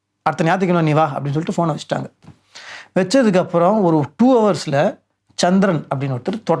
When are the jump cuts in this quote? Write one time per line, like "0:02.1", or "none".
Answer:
none